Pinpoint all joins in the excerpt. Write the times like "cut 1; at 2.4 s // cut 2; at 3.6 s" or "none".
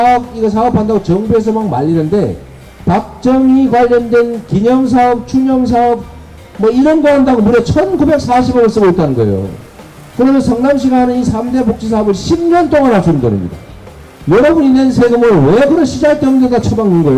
none